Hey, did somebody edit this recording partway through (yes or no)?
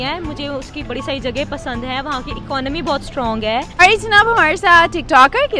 yes